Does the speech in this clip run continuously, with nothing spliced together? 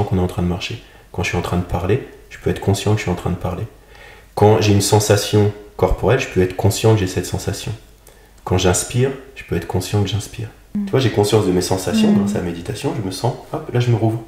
no; 1 cut; at 10.8 s

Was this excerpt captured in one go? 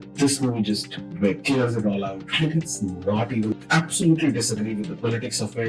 no; 1 cut; at 3.6 s

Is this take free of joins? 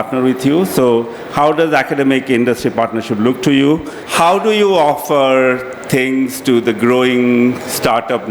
no; 1 cut; at 4.0 s

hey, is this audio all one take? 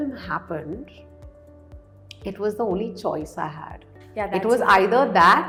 yes; 0 cuts

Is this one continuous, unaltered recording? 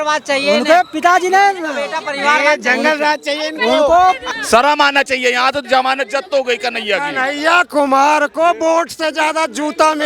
no; 1 cut; at 4.3 s

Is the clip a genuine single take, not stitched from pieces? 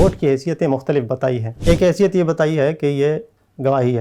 no; 1 cut; at 1.5 s

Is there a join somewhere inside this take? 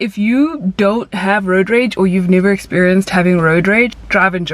no; 0 cuts

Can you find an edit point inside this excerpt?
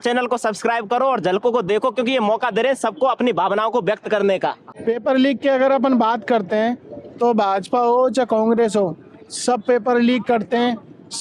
yes; 1 cut; at 4.7 s

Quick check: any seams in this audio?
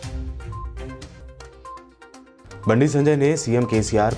yes; 1 cut; at 0.9 s

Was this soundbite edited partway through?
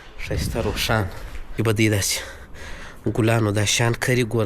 yes; 1 cut; at 1.5 s

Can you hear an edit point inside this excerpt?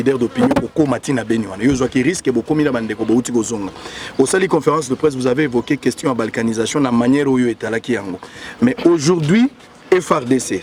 no; 0 cuts

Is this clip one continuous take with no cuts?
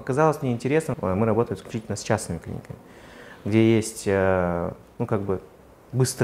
no; 1 cut; at 0.9 s

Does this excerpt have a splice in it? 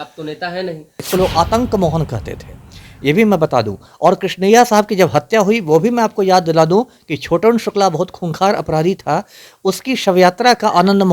yes; 1 cut; at 1.0 s

